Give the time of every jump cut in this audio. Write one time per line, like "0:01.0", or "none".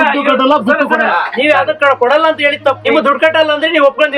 0:02.8

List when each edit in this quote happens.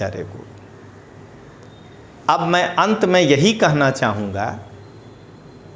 none

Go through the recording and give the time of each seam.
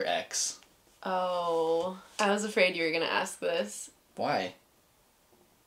0:02.0

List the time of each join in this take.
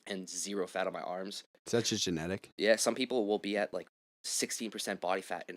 0:01.6

